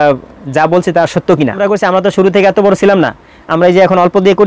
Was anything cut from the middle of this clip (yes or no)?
yes